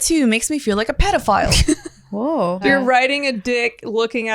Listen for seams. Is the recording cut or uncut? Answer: cut